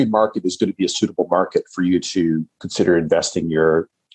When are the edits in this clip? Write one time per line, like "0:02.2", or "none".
0:02.6